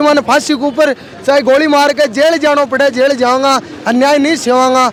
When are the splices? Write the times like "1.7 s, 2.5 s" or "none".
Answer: none